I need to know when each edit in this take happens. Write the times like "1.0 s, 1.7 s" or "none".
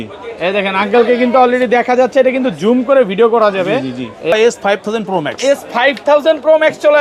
4.3 s